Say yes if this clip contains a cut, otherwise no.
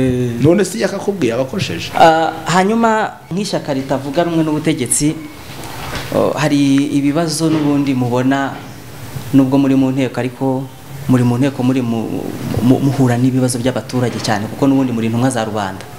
yes